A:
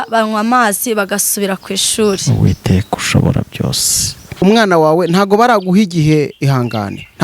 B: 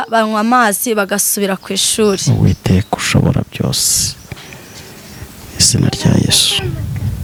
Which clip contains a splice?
A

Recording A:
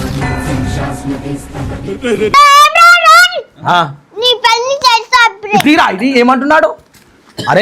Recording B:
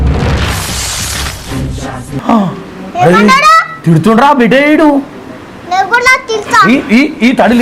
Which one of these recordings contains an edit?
A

